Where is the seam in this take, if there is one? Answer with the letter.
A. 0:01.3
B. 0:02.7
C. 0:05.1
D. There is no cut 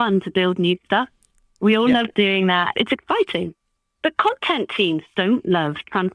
B